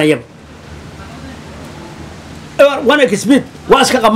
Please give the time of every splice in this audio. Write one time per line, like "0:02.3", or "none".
none